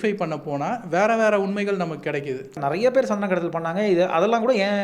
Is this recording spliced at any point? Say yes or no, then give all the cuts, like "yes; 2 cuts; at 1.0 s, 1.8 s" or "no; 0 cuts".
yes; 1 cut; at 2.6 s